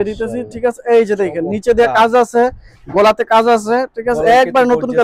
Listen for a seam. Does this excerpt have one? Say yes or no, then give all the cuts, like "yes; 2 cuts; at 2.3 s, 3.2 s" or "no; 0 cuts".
no; 0 cuts